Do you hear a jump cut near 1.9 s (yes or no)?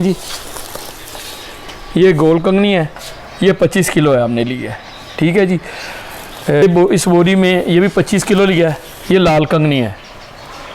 no